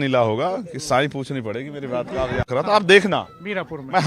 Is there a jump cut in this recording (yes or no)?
yes